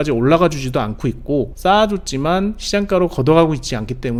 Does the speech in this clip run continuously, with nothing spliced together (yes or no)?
yes